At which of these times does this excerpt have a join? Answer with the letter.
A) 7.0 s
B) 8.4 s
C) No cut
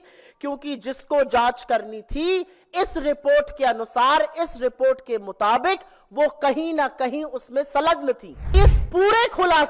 B